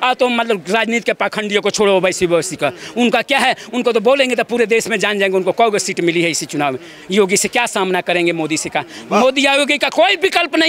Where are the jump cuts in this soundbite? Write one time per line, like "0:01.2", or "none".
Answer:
none